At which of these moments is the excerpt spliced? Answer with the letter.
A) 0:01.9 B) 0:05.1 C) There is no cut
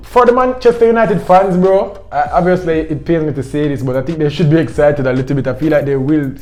C